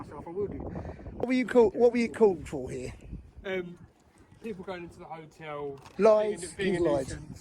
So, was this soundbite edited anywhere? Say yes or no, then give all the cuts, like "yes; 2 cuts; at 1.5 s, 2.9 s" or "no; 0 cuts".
yes; 1 cut; at 1.3 s